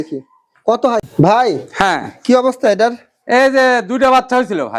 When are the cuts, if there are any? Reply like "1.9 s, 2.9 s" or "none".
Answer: 1.0 s